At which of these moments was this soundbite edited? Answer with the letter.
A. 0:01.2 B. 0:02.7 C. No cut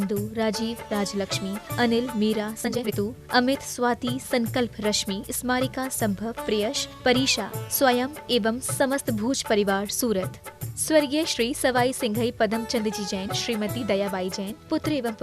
B